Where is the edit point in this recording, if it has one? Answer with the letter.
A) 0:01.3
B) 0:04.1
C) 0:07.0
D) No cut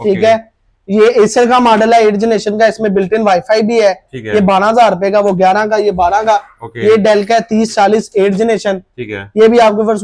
D